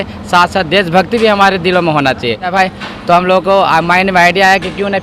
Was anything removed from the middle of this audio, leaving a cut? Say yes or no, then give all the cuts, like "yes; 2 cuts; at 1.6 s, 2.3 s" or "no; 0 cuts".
yes; 1 cut; at 2.5 s